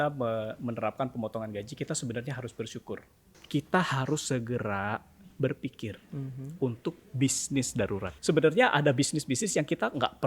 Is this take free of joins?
no; 2 cuts; at 3.3 s, 8.1 s

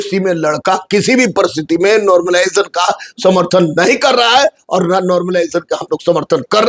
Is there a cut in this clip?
no; 0 cuts

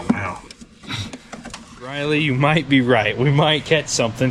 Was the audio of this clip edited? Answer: yes; 1 cut; at 2.0 s

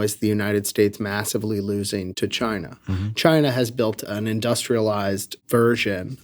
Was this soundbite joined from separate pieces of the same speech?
yes; 3 cuts; at 2.1 s, 4.0 s, 5.3 s

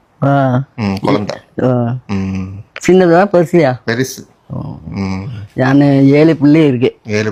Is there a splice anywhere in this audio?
no; 0 cuts

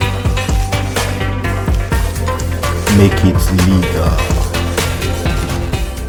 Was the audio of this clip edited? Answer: no; 0 cuts

